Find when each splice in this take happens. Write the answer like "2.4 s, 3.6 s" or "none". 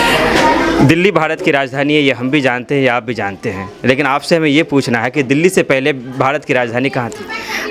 none